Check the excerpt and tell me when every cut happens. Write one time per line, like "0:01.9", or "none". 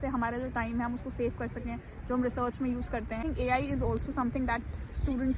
0:03.2